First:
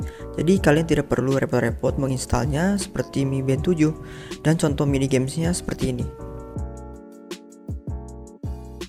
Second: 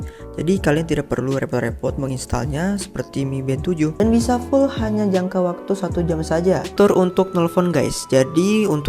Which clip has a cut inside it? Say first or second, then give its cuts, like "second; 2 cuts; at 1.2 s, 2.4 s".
second; 2 cuts; at 4.0 s, 6.7 s